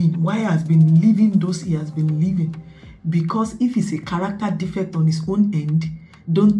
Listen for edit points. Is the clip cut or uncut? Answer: uncut